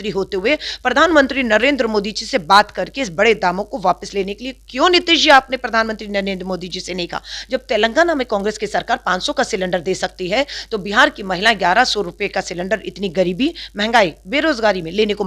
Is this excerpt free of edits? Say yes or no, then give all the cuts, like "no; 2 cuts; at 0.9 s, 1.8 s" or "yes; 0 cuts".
yes; 0 cuts